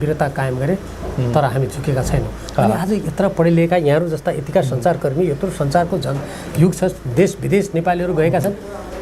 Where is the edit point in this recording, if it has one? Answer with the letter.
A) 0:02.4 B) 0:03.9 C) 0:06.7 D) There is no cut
D